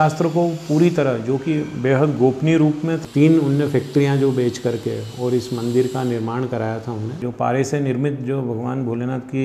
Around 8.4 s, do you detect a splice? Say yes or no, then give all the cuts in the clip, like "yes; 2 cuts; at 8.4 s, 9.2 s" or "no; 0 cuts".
no; 2 cuts; at 3.0 s, 7.2 s